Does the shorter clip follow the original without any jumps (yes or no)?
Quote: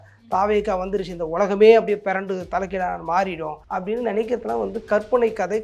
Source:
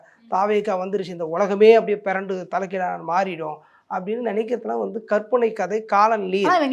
no